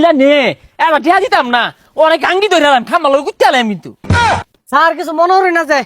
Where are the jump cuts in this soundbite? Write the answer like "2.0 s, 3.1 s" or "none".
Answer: 4.1 s